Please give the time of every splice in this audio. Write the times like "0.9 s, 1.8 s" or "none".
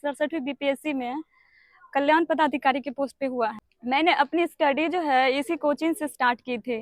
3.7 s